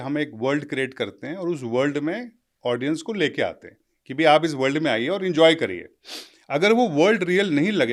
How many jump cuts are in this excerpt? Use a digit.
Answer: 0